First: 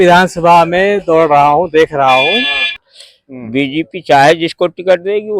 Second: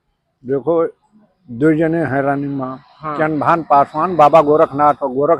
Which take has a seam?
first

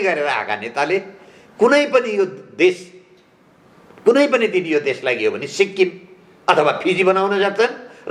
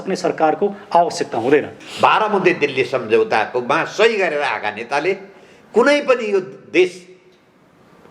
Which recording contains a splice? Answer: second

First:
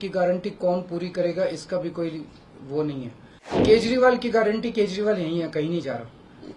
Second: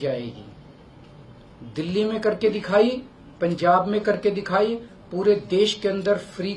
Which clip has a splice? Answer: first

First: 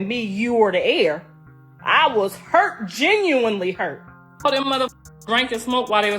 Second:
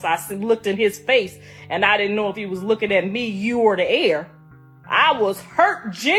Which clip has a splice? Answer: first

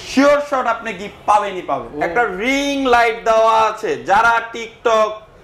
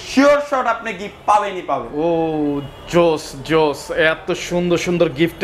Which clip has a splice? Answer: first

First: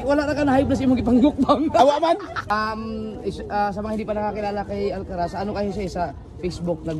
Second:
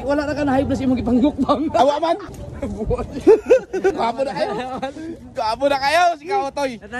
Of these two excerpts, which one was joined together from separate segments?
second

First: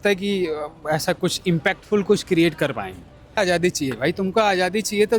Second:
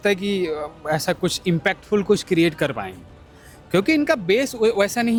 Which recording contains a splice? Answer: first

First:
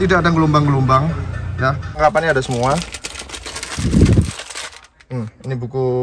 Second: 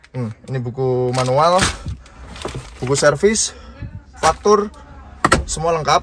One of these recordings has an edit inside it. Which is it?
first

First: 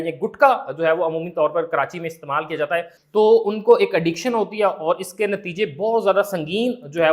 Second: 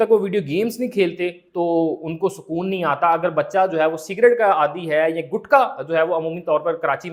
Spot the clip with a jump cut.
first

